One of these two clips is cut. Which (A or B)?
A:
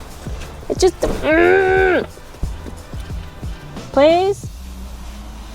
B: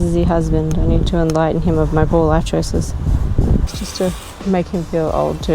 B